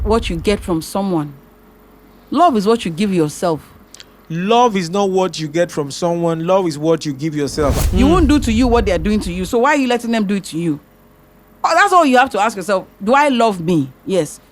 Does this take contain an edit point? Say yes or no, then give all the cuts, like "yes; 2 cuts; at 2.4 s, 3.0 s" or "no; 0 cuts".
yes; 1 cut; at 7.8 s